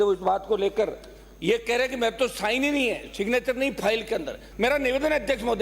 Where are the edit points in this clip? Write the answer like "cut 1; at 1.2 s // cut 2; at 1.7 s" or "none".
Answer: cut 1; at 4.4 s